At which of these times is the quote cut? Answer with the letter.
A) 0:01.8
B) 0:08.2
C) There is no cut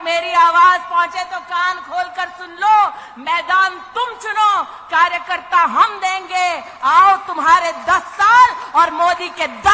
C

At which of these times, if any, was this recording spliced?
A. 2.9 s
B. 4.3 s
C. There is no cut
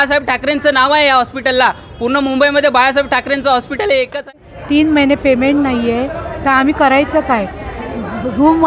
B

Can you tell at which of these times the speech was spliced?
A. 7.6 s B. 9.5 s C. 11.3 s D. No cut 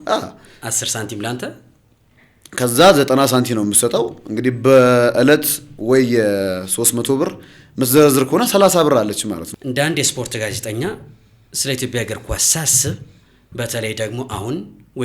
B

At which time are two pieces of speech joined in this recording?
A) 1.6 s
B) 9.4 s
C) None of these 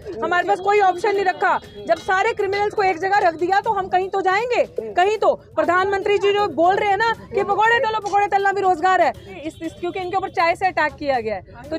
B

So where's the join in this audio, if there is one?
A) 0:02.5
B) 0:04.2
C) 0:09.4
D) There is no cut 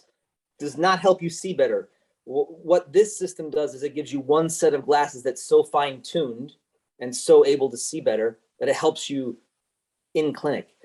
D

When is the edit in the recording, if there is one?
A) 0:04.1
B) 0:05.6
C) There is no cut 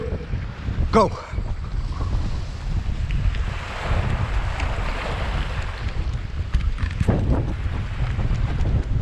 C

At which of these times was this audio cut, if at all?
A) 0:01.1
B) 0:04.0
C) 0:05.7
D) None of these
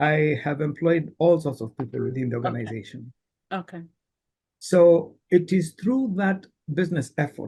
D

